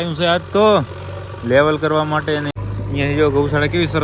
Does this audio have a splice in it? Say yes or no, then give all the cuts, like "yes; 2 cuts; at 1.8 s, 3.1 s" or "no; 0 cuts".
yes; 1 cut; at 2.5 s